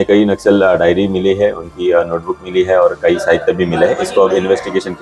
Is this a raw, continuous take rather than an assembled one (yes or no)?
yes